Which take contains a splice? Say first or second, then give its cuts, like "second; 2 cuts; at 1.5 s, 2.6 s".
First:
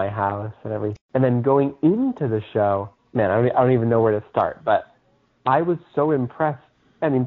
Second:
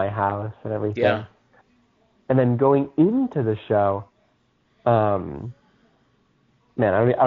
first; 2 cuts; at 0.9 s, 3.0 s